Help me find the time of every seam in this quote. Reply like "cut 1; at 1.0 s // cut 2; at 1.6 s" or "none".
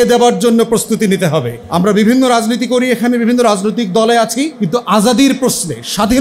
cut 1; at 1.6 s // cut 2; at 4.6 s